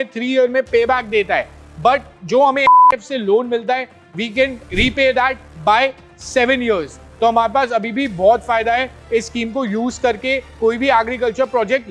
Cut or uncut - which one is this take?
uncut